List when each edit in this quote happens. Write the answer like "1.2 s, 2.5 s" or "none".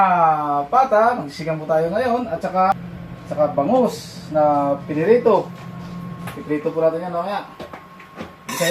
2.7 s